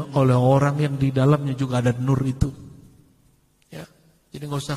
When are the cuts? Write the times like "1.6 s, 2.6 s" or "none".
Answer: none